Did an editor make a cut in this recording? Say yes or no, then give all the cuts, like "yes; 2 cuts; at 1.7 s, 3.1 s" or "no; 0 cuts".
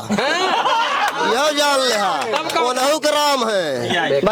no; 0 cuts